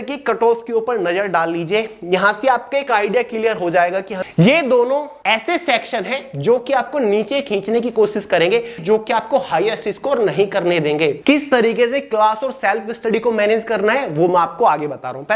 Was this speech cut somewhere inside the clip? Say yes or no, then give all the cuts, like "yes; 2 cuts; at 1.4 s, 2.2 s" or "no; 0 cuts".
yes; 4 cuts; at 4.1 s, 5.1 s, 8.8 s, 11.2 s